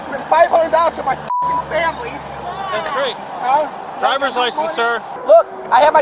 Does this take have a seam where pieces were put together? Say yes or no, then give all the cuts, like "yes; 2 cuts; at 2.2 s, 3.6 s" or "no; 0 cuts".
yes; 1 cut; at 5.1 s